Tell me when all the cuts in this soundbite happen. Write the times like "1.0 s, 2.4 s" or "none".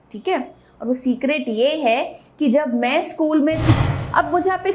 3.7 s